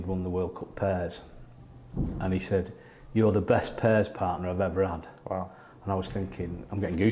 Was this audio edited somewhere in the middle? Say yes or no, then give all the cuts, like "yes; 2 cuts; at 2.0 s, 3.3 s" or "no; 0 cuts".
no; 0 cuts